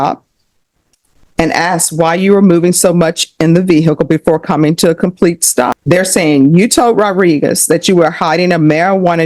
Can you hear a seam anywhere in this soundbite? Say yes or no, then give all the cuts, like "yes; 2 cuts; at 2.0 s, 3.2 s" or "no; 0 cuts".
yes; 1 cut; at 5.8 s